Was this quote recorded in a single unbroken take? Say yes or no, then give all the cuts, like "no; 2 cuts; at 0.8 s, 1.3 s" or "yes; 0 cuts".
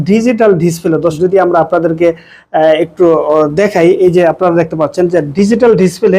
no; 1 cut; at 1.1 s